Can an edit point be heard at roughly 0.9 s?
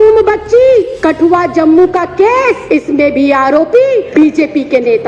yes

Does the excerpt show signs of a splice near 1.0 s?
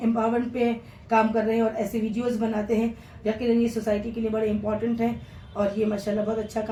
no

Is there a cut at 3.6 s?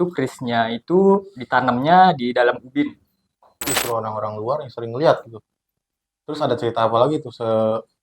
yes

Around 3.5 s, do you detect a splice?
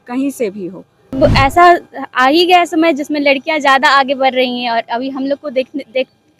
no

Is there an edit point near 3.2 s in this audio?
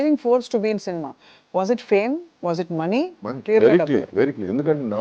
yes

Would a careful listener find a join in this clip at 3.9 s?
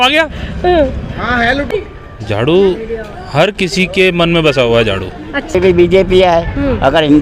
no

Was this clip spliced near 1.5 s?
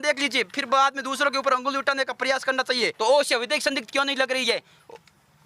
no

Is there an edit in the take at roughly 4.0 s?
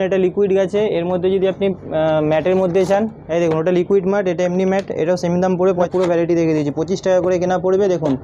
no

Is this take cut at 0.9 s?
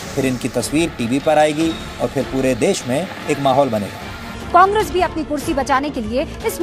no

